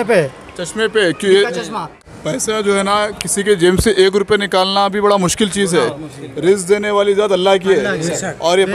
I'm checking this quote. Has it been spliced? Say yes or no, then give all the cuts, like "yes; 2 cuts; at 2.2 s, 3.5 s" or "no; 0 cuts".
yes; 1 cut; at 1.9 s